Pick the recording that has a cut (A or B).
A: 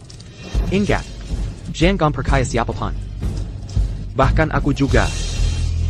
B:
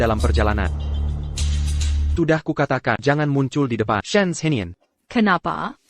B